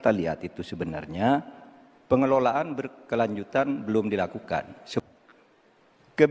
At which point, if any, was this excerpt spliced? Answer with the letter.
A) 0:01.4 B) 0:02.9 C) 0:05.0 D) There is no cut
C